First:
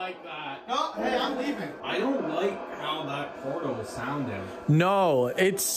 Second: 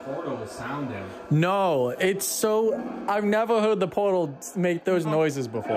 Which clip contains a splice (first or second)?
first